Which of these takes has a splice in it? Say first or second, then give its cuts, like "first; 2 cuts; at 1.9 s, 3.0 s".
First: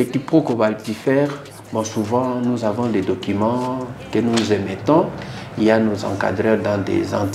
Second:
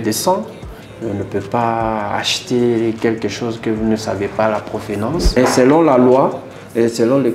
second; 1 cut; at 5.4 s